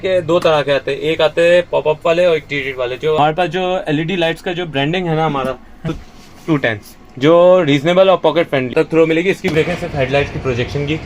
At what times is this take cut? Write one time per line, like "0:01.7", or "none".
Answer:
0:03.2
0:05.9
0:08.7
0:09.5